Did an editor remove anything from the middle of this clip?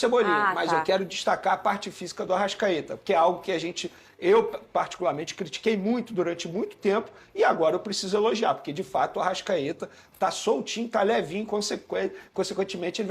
no; 0 cuts

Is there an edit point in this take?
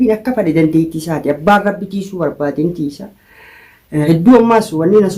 yes; 1 cut; at 4.0 s

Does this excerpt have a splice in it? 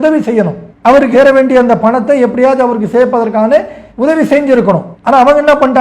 yes; 1 cut; at 4.9 s

